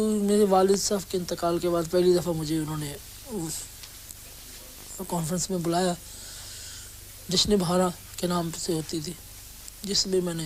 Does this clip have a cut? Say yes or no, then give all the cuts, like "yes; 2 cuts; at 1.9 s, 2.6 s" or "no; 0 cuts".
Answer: no; 0 cuts